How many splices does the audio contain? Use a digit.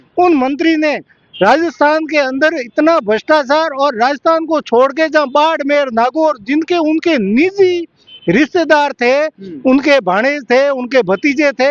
0